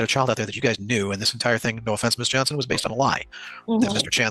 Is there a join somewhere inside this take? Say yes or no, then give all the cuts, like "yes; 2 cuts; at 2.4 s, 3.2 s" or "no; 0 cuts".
no; 0 cuts